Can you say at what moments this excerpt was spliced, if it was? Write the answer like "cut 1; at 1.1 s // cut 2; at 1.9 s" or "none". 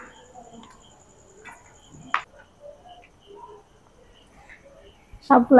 none